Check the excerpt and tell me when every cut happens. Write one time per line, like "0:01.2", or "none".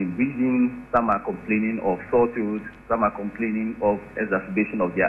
0:04.1